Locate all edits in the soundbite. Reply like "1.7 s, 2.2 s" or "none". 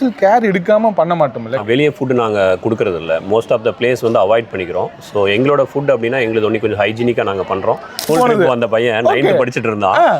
1.6 s, 8.1 s